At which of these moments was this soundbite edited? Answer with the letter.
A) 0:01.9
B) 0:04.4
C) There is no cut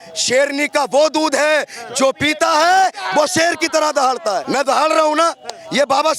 B